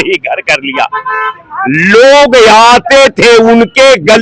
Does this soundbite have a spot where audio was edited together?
no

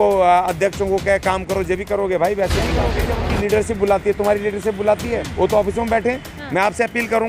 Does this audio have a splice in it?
yes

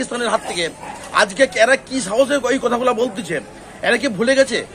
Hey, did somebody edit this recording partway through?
no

